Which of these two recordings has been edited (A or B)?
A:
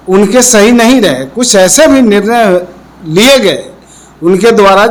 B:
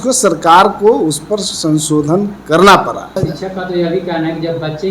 B